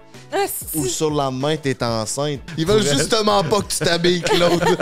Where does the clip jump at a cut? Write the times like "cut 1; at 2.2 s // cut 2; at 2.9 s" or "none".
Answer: cut 1; at 2.5 s